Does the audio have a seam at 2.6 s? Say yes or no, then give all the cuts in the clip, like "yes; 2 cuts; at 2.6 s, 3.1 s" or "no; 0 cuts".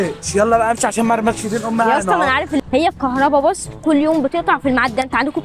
yes; 1 cut; at 2.6 s